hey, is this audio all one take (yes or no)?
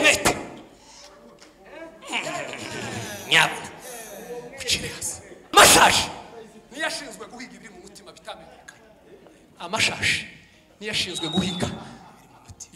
no